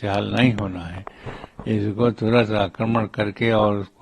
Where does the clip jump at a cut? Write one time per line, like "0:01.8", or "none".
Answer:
none

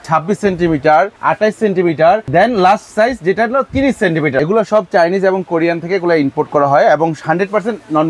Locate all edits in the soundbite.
0:02.2
0:04.4

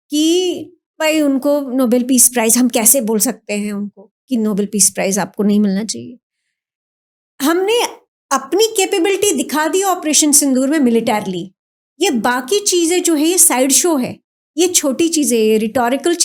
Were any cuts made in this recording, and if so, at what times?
none

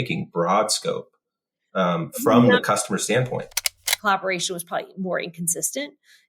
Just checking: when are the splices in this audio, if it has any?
0:03.8

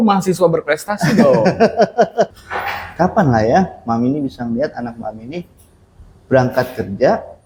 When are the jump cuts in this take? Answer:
0:02.4

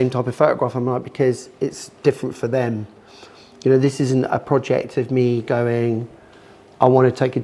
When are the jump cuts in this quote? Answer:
none

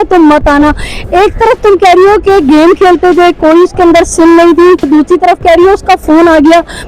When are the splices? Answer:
0:04.8

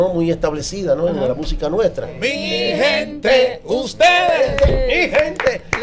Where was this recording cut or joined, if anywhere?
0:02.2

